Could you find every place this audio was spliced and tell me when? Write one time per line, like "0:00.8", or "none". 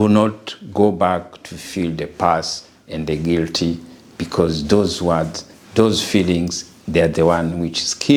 none